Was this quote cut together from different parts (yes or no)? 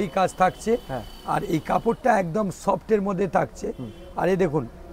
no